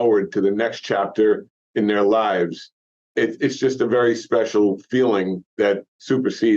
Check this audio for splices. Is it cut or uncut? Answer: cut